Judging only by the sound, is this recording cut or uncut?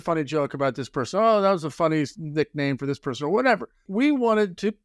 uncut